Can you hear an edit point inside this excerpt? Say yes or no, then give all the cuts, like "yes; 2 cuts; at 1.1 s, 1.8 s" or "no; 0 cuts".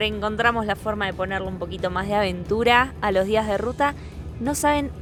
no; 0 cuts